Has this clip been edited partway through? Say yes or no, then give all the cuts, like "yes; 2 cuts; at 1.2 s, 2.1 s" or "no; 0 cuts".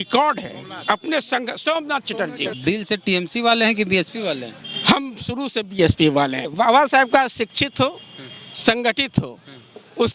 yes; 2 cuts; at 2.5 s, 6.5 s